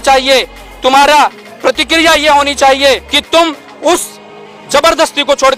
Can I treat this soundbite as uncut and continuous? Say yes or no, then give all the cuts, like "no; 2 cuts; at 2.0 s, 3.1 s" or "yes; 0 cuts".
no; 1 cut; at 3.1 s